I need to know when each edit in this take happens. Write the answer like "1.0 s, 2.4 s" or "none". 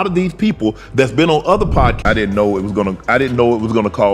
2.0 s